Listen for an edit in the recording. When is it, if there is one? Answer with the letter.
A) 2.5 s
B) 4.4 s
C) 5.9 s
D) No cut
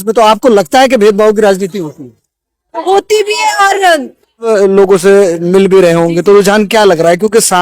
B